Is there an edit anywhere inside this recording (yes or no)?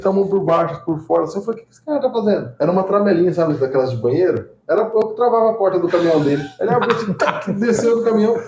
no